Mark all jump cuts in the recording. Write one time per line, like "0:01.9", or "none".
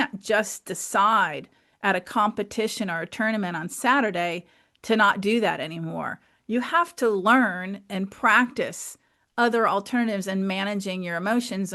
none